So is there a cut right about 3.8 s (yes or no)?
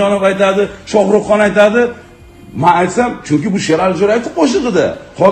no